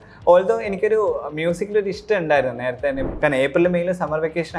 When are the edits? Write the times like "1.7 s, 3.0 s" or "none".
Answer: 3.1 s